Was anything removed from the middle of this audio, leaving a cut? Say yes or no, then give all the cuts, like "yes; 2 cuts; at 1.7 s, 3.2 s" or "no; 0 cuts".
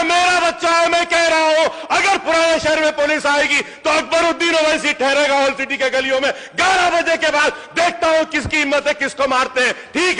no; 0 cuts